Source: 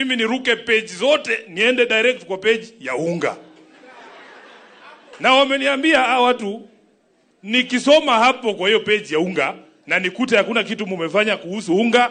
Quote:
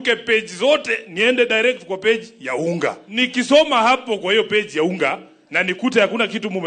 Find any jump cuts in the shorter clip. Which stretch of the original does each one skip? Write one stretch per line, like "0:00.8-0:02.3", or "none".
0:03.4-0:07.4